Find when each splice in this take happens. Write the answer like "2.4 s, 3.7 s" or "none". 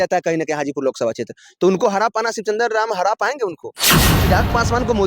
4.1 s

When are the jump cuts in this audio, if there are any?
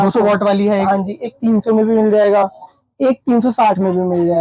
none

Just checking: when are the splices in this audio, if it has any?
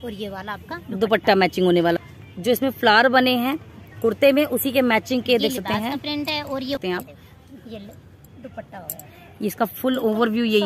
2.0 s, 6.8 s

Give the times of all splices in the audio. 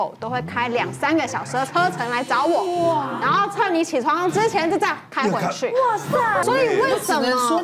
6.4 s

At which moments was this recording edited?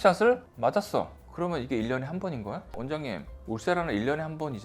2.8 s

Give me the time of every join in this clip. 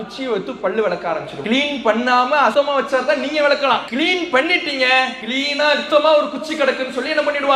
1.3 s, 2.5 s, 3.9 s, 5.5 s

